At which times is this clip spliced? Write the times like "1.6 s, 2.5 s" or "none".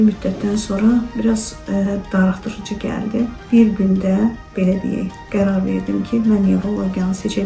3.4 s